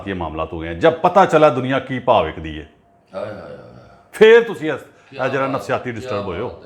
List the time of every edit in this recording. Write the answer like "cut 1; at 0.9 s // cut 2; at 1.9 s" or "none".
none